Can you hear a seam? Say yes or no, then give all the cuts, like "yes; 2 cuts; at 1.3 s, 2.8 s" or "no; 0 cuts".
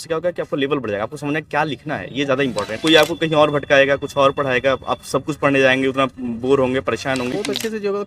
yes; 2 cuts; at 2.7 s, 7.3 s